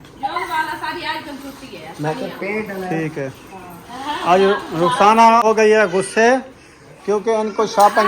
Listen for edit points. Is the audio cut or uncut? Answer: cut